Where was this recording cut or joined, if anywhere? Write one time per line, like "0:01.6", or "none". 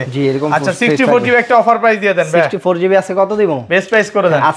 none